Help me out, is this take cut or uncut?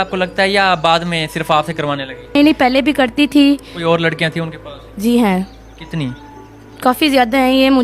cut